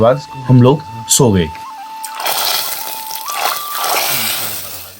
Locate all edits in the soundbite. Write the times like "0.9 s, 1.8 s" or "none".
none